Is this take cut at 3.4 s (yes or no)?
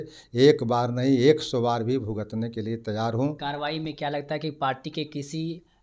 yes